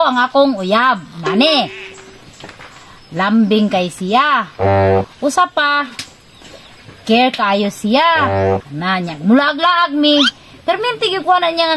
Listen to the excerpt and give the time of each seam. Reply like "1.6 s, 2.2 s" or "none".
none